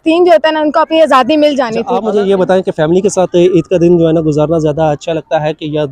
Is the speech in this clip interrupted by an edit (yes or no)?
yes